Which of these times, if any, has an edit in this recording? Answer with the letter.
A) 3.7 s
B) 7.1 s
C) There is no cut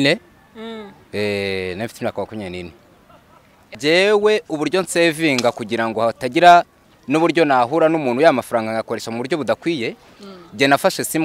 A